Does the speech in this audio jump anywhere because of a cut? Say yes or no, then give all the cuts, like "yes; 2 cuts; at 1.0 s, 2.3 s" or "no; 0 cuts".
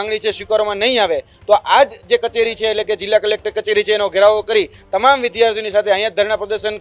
no; 0 cuts